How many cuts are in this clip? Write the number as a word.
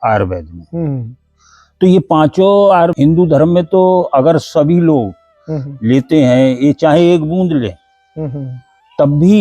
one